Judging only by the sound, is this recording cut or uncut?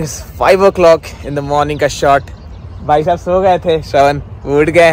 uncut